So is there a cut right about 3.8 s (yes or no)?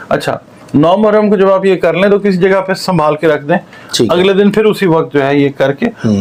no